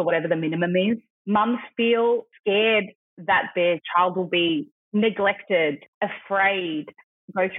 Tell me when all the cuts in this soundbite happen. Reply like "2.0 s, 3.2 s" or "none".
1.1 s, 2.3 s, 4.8 s, 5.9 s